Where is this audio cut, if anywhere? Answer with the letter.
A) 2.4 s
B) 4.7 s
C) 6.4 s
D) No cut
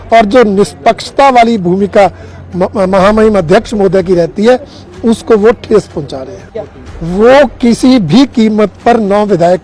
C